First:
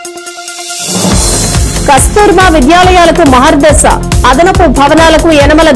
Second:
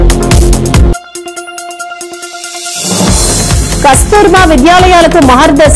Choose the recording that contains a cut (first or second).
second